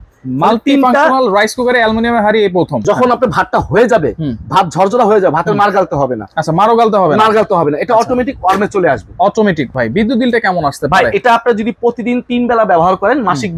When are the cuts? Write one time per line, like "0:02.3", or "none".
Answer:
0:02.8
0:09.7